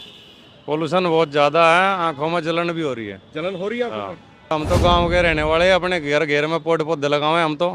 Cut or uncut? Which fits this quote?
cut